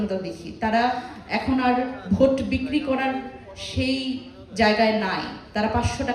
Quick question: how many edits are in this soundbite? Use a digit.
0